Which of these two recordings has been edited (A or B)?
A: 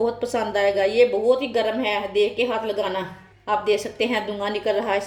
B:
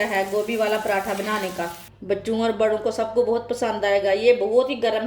B